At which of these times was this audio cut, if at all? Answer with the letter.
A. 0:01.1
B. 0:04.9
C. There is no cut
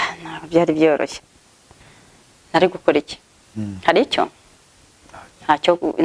A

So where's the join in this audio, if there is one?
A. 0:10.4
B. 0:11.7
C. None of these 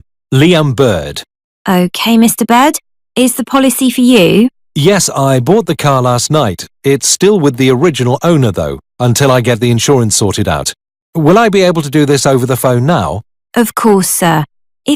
C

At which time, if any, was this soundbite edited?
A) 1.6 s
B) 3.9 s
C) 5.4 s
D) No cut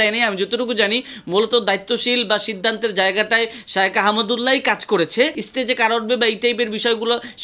C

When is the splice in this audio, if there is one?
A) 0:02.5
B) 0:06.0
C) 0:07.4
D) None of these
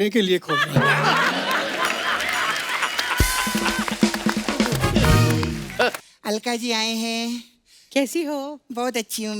B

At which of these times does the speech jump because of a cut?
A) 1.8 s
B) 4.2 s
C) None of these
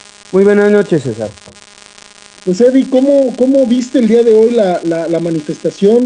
C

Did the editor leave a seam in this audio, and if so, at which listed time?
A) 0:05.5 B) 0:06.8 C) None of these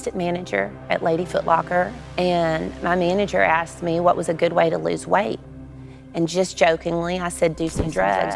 C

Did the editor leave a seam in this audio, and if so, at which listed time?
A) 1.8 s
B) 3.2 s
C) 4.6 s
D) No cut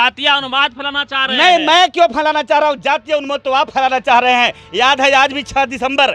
D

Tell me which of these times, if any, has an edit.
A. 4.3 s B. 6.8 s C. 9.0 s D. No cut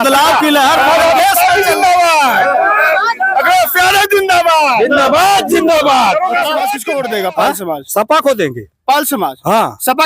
B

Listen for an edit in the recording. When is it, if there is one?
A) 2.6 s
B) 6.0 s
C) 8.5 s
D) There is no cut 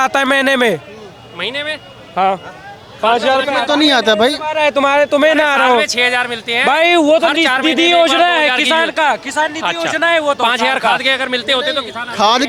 D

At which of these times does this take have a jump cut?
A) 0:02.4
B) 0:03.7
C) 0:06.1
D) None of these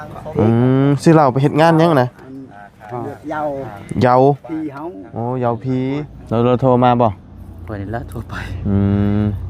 C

